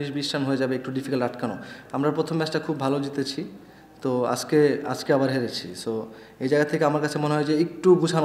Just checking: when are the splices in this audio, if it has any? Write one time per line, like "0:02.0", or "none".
0:01.8